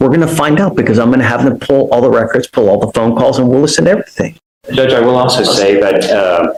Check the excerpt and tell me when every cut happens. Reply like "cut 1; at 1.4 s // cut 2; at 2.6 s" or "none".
none